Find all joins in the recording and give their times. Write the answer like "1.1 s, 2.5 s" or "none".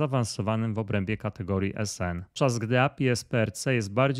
2.3 s